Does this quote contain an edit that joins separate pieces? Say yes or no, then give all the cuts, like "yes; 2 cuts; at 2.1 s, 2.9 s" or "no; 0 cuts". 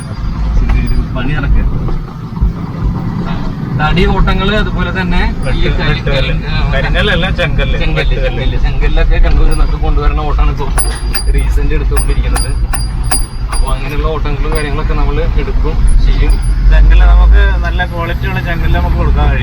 no; 0 cuts